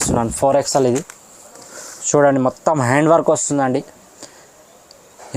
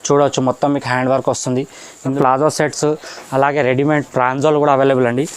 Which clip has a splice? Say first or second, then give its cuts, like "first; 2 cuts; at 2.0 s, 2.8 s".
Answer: second; 1 cut; at 2.1 s